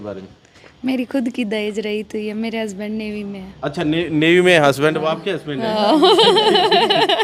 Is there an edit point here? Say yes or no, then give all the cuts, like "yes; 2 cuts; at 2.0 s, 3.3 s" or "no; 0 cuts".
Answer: no; 0 cuts